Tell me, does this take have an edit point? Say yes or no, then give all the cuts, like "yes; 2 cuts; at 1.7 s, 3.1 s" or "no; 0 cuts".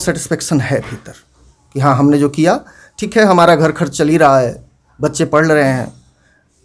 no; 0 cuts